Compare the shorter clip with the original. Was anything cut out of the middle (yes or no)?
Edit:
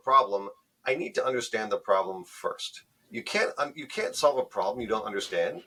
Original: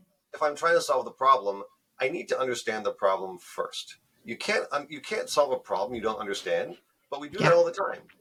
no